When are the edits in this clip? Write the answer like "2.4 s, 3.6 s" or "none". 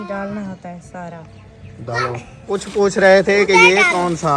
2.5 s